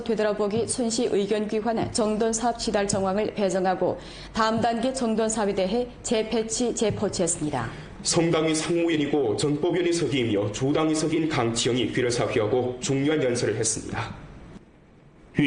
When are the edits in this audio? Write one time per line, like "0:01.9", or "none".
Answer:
0:10.0